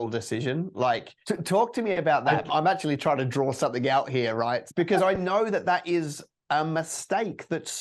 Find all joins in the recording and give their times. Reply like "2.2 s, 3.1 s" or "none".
1.1 s, 2.4 s, 4.7 s